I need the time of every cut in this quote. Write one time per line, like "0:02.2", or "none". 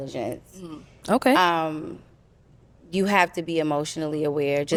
none